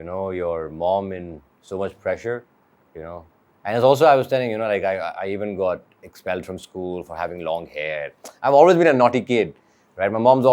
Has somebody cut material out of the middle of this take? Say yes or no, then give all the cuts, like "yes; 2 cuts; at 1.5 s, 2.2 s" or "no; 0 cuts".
no; 0 cuts